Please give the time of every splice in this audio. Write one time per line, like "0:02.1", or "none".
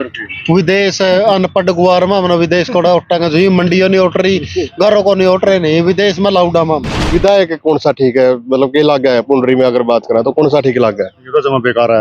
0:07.1